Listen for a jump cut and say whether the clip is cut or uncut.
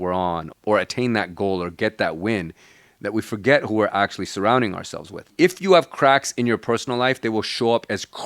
cut